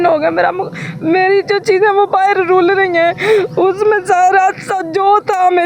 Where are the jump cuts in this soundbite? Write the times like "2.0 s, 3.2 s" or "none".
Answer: none

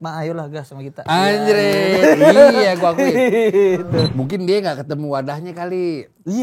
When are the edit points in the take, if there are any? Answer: 4.1 s

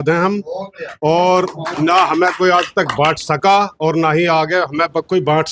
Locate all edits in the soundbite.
none

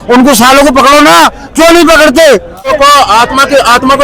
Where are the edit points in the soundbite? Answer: 2.7 s

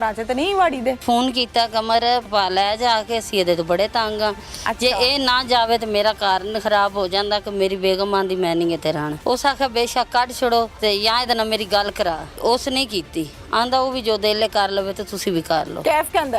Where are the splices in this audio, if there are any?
1.0 s, 2.2 s, 9.1 s, 10.7 s, 12.4 s

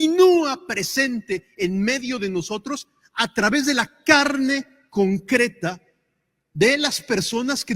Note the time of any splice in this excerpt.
none

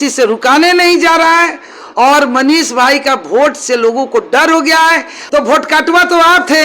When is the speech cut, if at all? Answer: 5.1 s

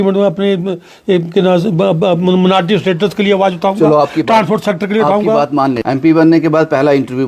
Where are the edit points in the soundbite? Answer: 5.8 s

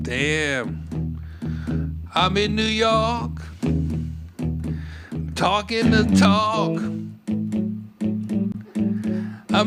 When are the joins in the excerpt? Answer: none

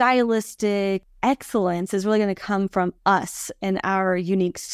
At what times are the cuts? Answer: 1.1 s

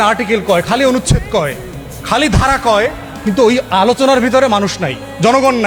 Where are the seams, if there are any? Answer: none

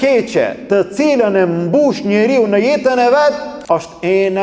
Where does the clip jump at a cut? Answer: 3.5 s

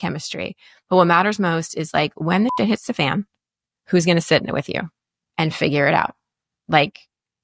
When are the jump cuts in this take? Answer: none

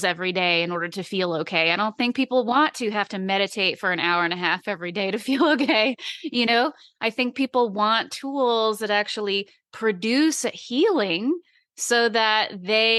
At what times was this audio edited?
none

